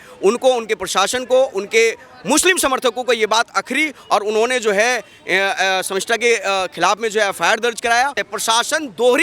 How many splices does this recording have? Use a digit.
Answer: 1